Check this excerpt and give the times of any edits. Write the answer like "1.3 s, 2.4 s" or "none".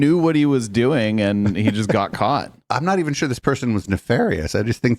2.6 s